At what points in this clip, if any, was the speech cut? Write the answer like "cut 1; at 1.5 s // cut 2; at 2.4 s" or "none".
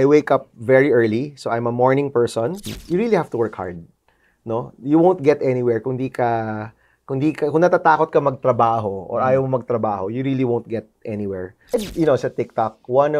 cut 1; at 2.7 s // cut 2; at 11.6 s

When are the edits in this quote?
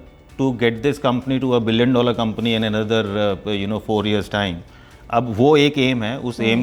none

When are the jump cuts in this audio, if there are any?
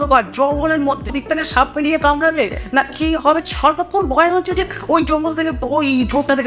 cut 1; at 1.1 s // cut 2; at 3.4 s

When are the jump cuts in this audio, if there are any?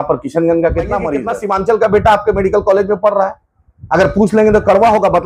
cut 1; at 1.3 s

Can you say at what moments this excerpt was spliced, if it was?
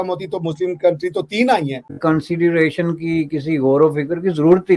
cut 1; at 2.0 s

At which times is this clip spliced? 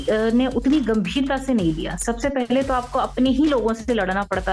none

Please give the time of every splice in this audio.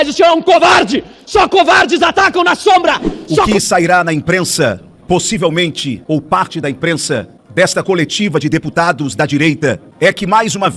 cut 1; at 3.5 s // cut 2; at 5.9 s // cut 3; at 7.4 s // cut 4; at 9.9 s

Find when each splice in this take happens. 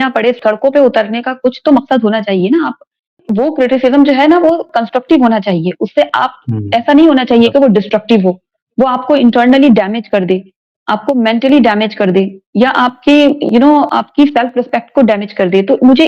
cut 1; at 3.2 s

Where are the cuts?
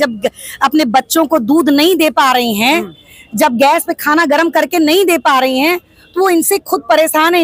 none

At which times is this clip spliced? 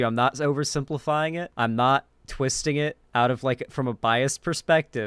cut 1; at 1.5 s // cut 2; at 3.0 s

